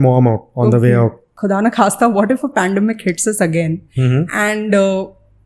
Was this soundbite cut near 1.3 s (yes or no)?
yes